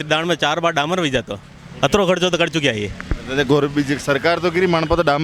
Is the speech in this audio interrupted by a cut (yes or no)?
no